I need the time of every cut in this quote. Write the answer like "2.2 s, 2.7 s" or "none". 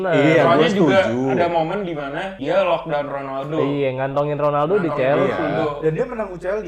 2.3 s